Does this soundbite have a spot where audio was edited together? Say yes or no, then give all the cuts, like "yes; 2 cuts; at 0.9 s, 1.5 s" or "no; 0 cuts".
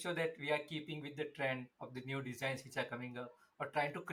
no; 0 cuts